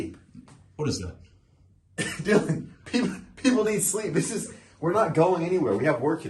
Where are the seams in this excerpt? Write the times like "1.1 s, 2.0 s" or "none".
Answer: none